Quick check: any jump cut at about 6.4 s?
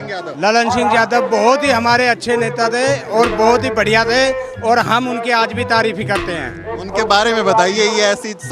no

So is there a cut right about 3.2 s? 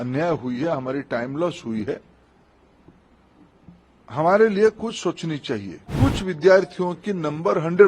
no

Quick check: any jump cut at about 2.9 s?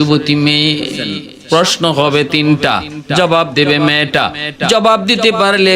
no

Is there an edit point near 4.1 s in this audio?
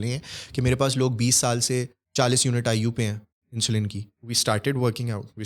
yes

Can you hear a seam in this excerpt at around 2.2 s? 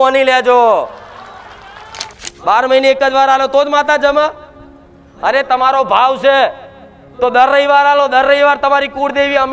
yes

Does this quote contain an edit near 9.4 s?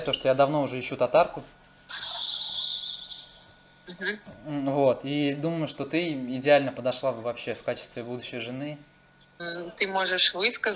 yes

